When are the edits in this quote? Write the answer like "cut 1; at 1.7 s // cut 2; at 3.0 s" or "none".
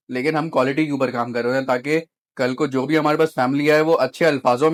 none